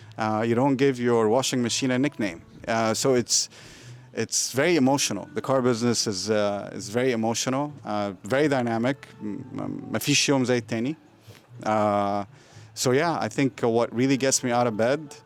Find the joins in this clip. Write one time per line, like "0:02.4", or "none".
none